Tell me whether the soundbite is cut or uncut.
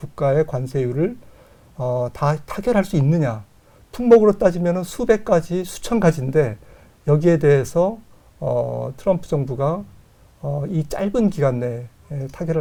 uncut